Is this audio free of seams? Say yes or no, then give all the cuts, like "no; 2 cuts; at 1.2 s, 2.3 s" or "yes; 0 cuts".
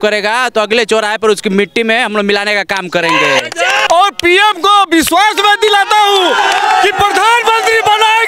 no; 1 cut; at 3.8 s